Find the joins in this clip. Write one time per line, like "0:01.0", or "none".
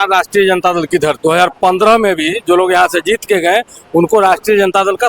0:01.2